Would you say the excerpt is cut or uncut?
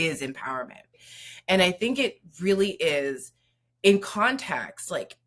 cut